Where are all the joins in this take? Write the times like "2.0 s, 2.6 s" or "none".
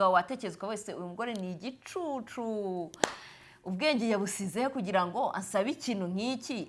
none

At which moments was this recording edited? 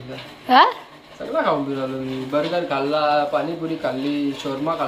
none

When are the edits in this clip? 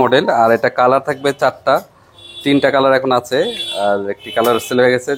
none

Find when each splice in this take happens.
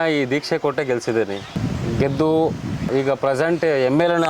1.5 s, 2.9 s

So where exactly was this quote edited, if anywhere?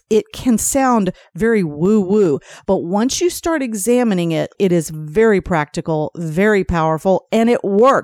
2.5 s, 4.5 s

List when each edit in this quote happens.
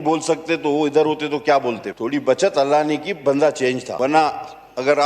1.9 s, 3.9 s

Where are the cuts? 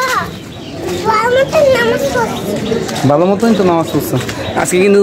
none

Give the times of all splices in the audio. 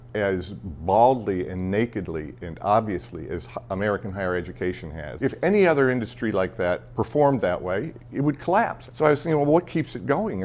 5.1 s, 6.9 s, 8.8 s

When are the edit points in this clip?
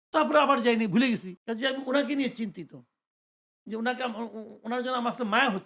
1.4 s

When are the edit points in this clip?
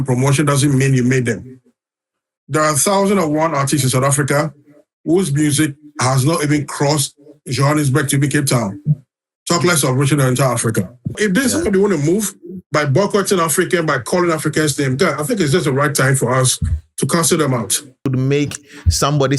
11.1 s, 18.1 s

